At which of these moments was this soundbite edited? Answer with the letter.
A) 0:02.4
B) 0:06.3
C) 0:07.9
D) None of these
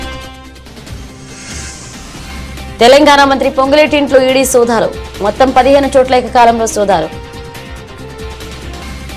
A